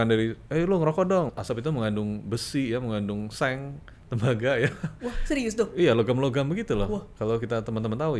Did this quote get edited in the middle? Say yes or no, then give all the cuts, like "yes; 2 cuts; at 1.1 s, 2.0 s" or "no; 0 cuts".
yes; 1 cut; at 1.3 s